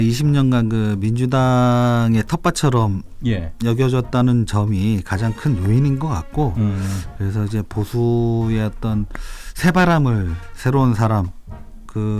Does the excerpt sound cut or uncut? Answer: cut